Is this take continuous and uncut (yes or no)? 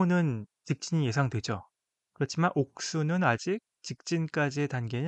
no